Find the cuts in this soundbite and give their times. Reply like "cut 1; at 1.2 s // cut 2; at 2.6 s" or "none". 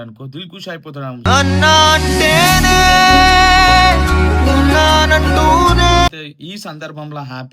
none